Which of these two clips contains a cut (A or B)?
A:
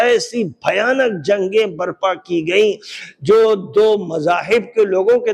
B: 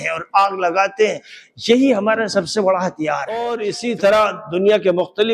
B